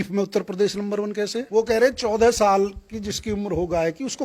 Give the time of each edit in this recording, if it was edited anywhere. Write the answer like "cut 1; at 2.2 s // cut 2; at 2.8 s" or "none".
cut 1; at 1.4 s